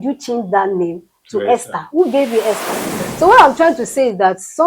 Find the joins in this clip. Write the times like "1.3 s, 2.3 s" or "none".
3.0 s

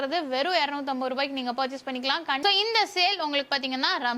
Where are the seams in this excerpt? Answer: 2.4 s

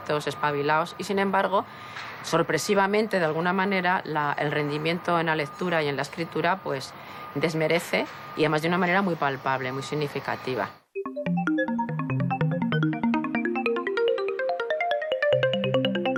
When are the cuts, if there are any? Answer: none

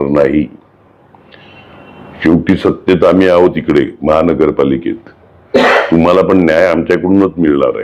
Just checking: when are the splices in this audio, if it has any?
none

